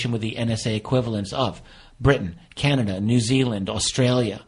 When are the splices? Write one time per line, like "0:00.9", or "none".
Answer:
none